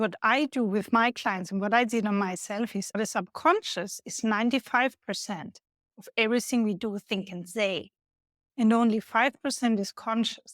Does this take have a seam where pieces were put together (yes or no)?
yes